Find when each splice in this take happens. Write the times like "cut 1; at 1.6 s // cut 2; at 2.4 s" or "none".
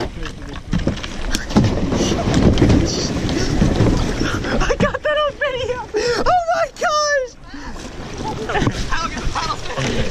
cut 1; at 8.5 s